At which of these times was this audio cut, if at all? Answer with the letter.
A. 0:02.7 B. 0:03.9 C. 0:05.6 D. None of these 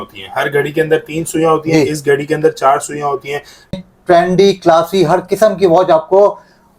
B